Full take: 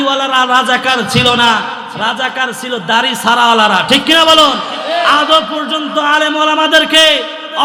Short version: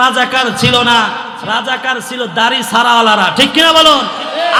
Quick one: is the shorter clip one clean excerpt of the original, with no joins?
yes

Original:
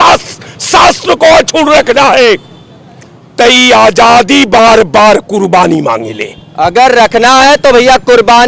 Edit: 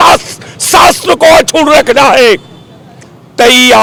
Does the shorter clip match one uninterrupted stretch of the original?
yes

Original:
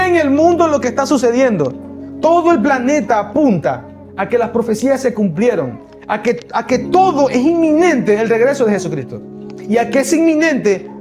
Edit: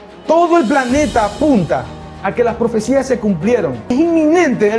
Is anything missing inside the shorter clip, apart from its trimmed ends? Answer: yes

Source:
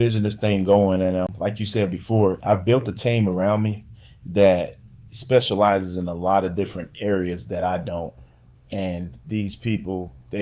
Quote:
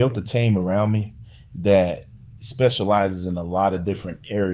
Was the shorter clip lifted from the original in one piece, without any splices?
yes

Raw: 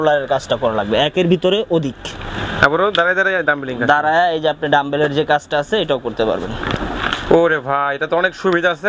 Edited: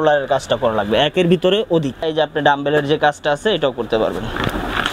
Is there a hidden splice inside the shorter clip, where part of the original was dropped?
yes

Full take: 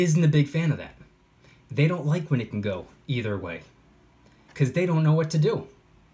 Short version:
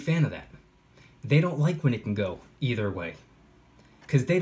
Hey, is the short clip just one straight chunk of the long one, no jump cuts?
yes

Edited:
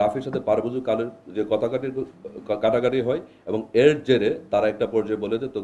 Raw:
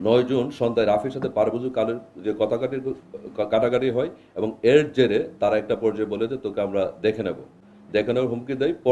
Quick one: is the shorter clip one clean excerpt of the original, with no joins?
yes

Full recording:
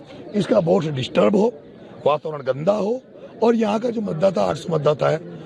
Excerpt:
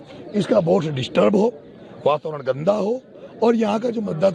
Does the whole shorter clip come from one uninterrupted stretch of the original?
yes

